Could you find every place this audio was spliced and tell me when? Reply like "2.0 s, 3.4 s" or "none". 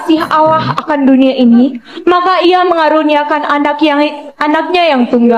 none